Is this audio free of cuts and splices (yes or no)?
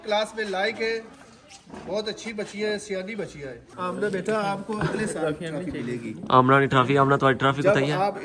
no